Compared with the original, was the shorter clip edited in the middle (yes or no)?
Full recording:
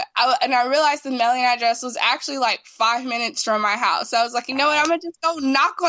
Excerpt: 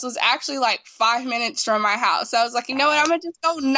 no